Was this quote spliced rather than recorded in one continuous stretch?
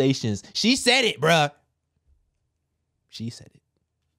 no; 0 cuts

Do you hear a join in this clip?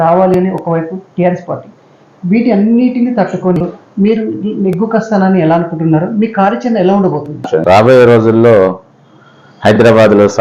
yes; 2 cuts; at 3.6 s, 7.5 s

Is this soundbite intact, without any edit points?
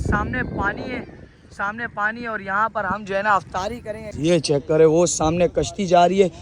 no; 1 cut; at 4.1 s

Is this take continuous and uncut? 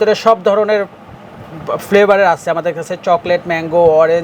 yes; 0 cuts

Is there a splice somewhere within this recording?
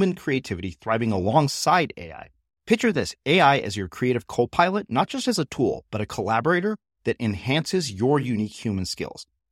no; 0 cuts

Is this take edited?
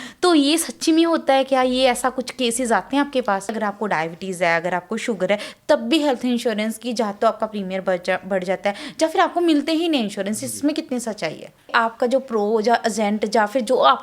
yes; 2 cuts; at 3.5 s, 11.7 s

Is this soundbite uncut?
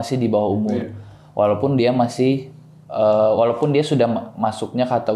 yes; 0 cuts

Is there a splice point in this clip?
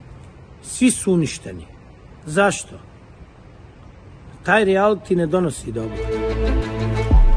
yes; 1 cut; at 6.0 s

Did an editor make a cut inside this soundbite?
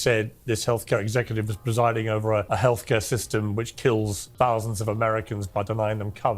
yes; 2 cuts; at 2.5 s, 4.2 s

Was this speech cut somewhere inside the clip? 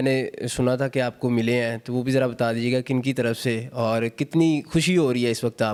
no; 0 cuts

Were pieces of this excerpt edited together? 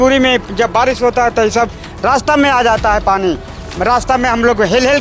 no; 0 cuts

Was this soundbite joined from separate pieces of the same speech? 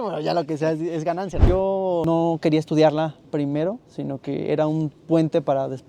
yes; 1 cut; at 1.4 s

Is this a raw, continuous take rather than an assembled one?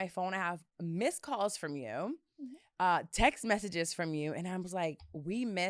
yes; 0 cuts

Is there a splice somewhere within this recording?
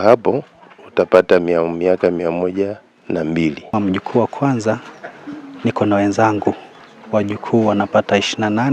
yes; 1 cut; at 3.7 s

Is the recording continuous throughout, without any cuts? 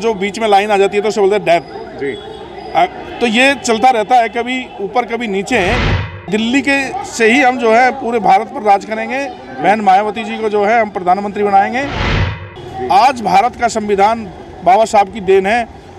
no; 2 cuts; at 6.1 s, 12.1 s

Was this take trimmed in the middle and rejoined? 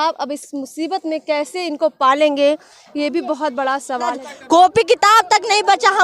yes; 1 cut; at 4.3 s

